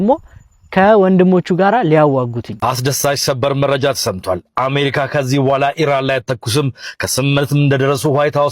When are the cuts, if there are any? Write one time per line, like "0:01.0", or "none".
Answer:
0:02.4